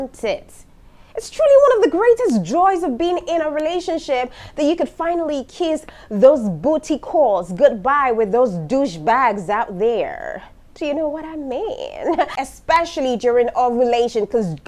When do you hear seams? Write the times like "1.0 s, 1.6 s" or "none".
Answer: 12.4 s

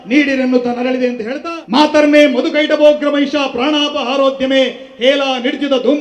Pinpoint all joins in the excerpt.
1.3 s

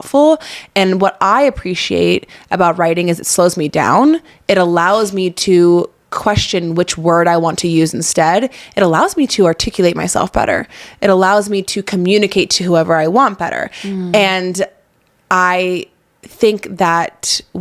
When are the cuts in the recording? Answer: none

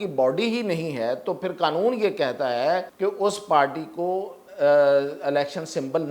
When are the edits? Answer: 2.9 s

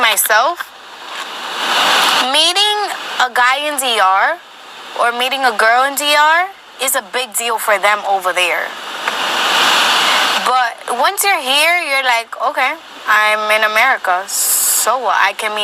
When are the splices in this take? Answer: none

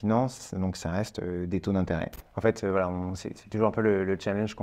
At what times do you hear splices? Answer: 2.2 s

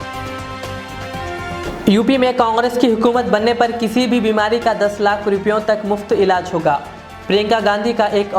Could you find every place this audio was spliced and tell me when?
1.4 s

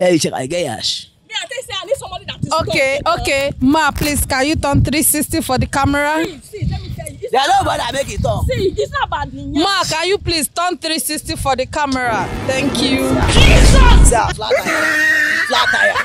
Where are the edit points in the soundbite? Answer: none

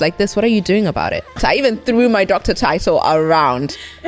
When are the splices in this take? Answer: 1.4 s

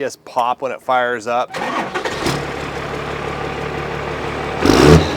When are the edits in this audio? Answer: 1.5 s

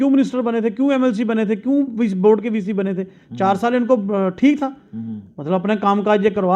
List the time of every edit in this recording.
none

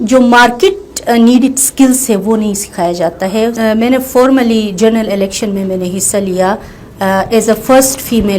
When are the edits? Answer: 3.6 s

